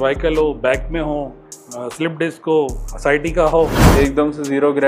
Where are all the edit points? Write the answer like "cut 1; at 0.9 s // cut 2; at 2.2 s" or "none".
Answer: cut 1; at 3.8 s